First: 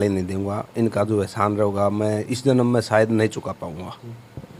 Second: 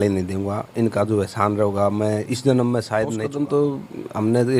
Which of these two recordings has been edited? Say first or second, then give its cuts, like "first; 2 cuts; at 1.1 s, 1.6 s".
second; 1 cut; at 3.2 s